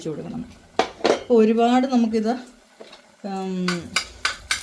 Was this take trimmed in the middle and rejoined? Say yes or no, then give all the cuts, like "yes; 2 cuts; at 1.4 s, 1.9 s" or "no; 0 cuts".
no; 0 cuts